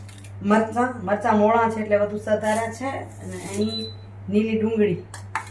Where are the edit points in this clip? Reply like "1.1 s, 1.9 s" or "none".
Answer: none